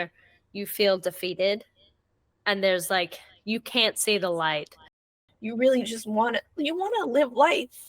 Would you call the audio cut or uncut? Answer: cut